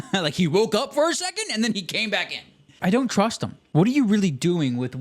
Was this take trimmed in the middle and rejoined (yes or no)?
yes